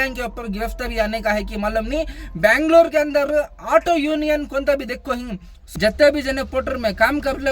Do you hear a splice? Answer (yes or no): yes